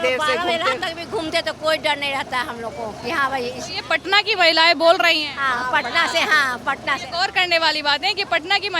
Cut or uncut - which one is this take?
uncut